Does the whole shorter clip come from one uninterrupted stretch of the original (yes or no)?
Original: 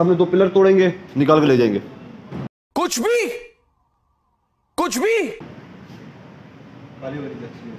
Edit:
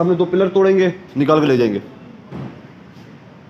no